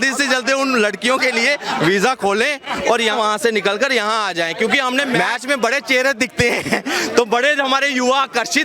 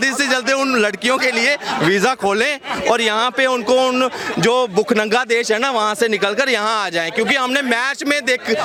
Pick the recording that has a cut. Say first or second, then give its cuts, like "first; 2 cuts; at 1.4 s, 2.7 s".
first; 2 cuts; at 3.1 s, 5.2 s